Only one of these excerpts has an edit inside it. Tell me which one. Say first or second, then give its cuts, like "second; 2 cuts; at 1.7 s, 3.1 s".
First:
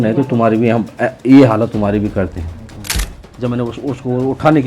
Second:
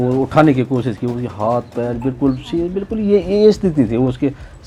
first; 1 cut; at 3.2 s